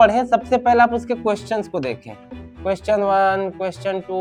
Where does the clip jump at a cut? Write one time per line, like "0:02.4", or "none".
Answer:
none